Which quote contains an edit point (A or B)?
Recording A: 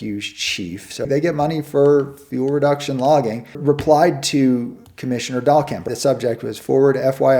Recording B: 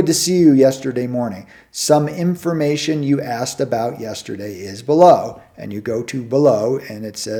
A